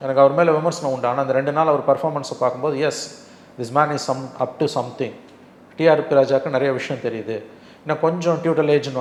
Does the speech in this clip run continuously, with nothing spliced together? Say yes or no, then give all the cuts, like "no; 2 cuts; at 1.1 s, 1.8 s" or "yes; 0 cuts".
yes; 0 cuts